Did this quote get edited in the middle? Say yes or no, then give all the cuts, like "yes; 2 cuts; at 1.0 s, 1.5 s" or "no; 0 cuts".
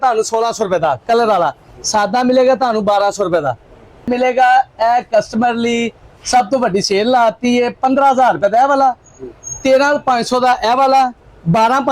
yes; 1 cut; at 4.0 s